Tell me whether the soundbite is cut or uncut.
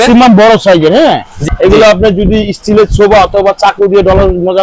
cut